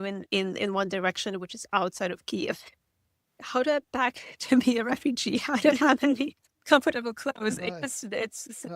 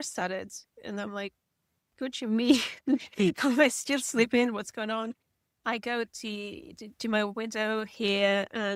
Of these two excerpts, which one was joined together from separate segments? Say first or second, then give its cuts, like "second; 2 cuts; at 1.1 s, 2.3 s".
first; 1 cut; at 3.2 s